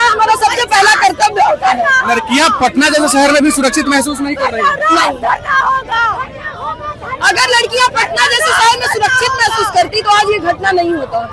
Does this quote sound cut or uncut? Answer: uncut